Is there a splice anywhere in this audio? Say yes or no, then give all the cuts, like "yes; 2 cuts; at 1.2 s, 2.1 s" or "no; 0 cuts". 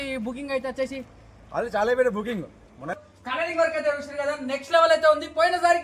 yes; 1 cut; at 2.9 s